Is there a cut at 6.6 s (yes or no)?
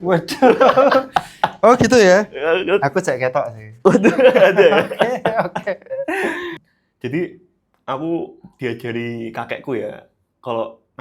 yes